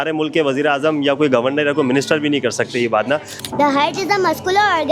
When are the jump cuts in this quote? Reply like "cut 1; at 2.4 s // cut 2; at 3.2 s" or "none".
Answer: cut 1; at 3.3 s